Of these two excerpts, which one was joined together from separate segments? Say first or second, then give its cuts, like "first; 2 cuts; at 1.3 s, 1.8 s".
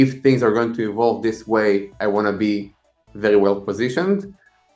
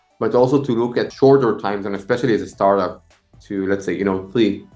second; 1 cut; at 1.1 s